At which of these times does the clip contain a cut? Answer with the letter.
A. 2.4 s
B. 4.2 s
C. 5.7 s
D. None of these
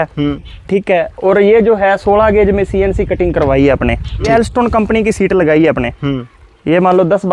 B